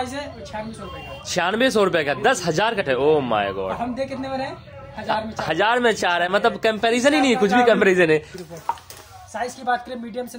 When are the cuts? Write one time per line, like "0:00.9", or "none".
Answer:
0:02.8
0:08.4